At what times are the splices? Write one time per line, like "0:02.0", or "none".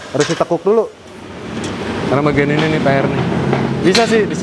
0:01.6